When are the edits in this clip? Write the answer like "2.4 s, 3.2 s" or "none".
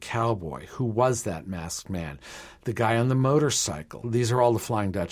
3.9 s